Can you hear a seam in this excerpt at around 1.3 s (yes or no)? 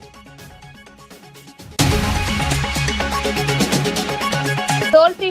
yes